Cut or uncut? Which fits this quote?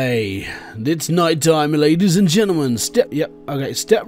cut